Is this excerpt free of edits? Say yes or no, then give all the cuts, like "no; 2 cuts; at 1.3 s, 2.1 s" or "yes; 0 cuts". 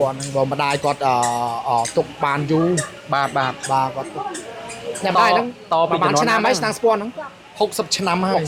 yes; 0 cuts